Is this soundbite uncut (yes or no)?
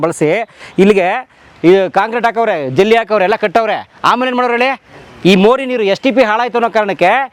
yes